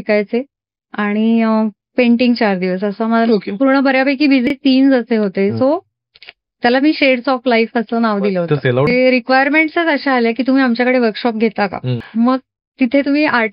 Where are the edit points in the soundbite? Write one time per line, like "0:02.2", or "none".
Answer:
0:04.5
0:08.9
0:11.9